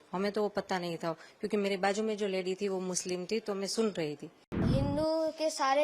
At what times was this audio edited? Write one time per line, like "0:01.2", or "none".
0:04.7